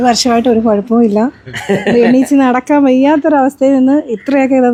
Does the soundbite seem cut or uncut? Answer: uncut